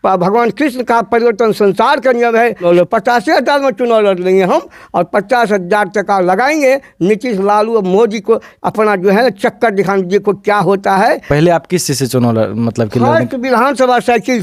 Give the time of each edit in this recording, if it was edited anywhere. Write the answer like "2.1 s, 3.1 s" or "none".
2.6 s, 11.2 s